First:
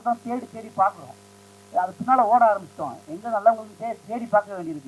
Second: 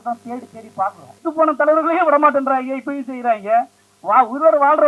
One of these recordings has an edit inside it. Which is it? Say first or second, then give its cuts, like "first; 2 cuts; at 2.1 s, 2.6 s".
second; 1 cut; at 1.2 s